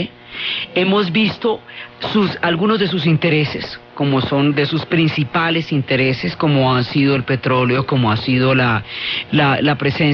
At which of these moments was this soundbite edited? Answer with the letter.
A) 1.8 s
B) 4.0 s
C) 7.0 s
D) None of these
A